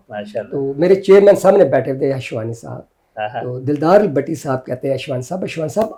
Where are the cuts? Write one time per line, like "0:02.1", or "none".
none